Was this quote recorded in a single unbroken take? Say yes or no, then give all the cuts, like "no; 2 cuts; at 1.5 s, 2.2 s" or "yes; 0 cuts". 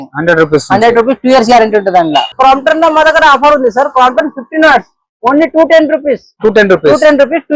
no; 1 cut; at 2.3 s